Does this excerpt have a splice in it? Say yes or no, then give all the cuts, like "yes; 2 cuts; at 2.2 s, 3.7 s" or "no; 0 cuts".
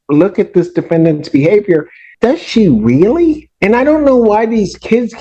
yes; 2 cuts; at 2.0 s, 3.5 s